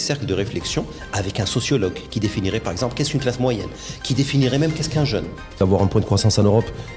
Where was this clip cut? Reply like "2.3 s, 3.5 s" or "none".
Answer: 5.6 s